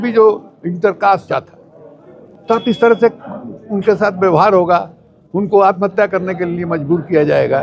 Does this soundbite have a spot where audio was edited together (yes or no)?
yes